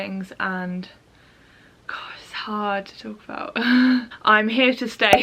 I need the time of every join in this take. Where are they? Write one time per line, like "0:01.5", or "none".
0:04.1